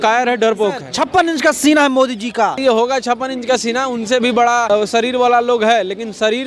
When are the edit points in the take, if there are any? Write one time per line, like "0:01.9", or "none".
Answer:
0:00.9
0:02.6
0:04.7

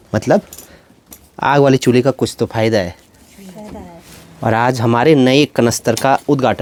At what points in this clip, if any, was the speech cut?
none

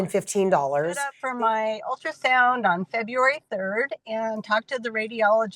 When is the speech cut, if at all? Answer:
0:01.2

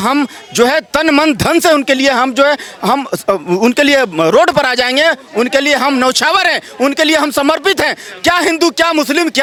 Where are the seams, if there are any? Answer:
none

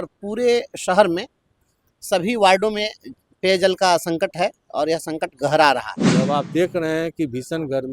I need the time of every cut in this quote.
0:06.0

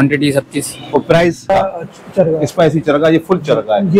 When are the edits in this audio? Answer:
0:01.5

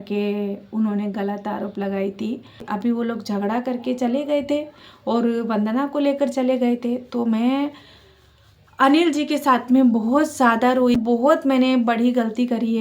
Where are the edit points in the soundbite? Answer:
0:02.7
0:11.0

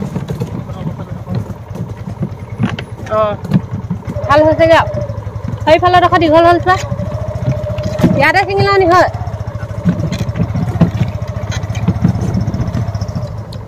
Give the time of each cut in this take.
none

